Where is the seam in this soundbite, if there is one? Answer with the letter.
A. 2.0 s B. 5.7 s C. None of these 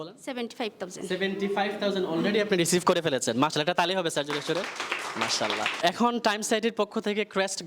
B